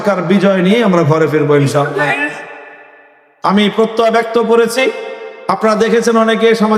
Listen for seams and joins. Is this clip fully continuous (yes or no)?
yes